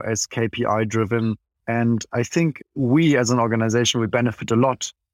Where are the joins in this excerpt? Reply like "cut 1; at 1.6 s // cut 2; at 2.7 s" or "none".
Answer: cut 1; at 1.5 s // cut 2; at 2.6 s